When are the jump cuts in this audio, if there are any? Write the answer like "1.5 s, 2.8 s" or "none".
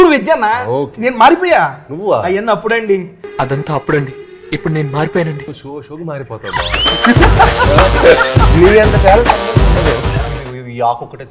10.2 s